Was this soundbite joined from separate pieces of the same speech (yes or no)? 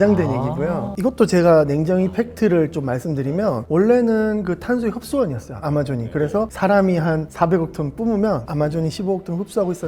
yes